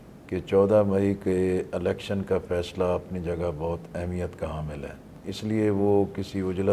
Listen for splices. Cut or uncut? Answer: cut